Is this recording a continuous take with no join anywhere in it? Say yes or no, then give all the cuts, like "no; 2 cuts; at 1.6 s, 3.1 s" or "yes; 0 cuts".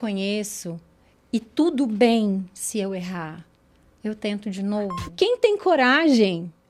no; 1 cut; at 5.0 s